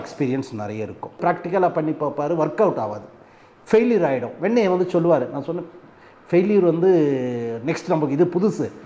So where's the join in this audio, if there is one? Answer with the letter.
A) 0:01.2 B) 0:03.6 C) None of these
A